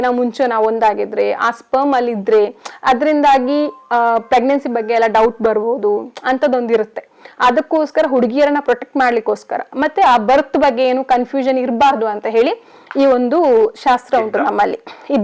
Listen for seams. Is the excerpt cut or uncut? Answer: uncut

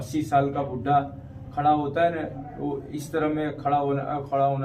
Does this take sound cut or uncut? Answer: uncut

